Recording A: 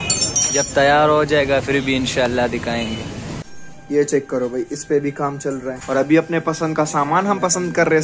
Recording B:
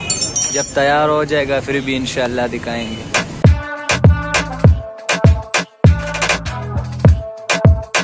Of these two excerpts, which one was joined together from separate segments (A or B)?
A